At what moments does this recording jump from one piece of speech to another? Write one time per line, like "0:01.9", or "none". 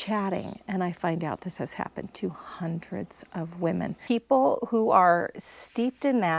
0:04.0